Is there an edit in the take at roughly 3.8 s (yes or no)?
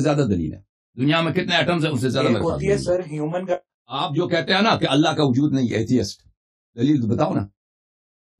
yes